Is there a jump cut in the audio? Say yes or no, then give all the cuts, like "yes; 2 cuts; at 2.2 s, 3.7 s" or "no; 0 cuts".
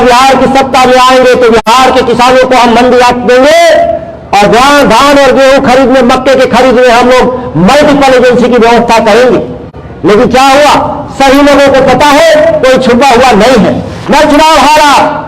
yes; 1 cut; at 13.9 s